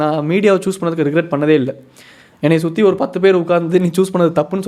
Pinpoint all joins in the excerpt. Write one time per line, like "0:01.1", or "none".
none